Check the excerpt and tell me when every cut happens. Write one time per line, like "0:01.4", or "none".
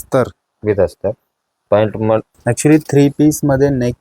0:02.3

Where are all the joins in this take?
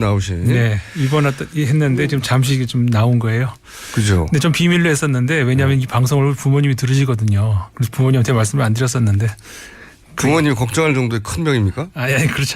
0:11.0

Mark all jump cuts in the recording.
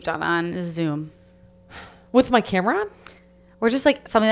none

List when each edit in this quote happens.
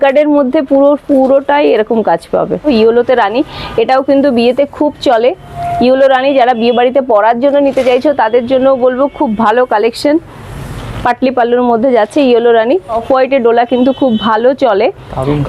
0:02.6
0:13.0

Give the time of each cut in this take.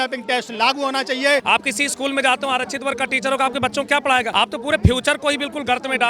0:01.4
0:04.3

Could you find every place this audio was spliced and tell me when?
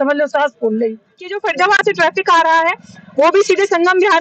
0:01.4

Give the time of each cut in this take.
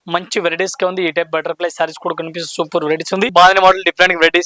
0:03.3

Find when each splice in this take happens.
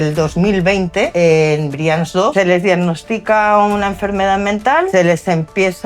0:01.1
0:02.3
0:04.9

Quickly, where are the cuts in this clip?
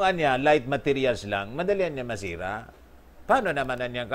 none

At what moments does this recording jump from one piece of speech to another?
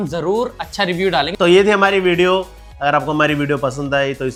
none

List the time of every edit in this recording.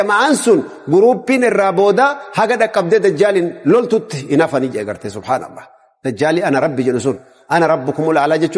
none

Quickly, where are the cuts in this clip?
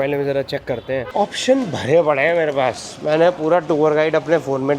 0:01.1

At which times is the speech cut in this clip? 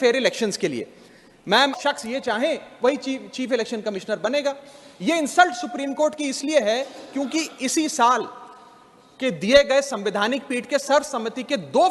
0:01.7

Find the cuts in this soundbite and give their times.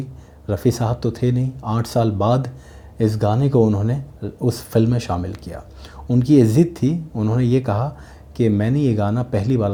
none

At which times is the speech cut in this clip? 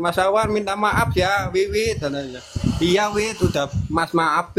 none

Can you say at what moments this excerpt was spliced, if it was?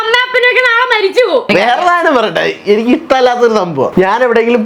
0:01.5

